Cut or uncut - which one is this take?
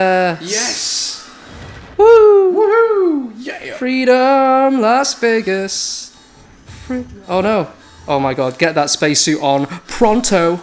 uncut